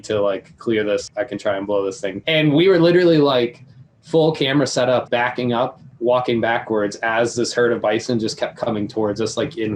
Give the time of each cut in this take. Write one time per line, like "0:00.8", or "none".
0:01.1
0:02.2
0:05.3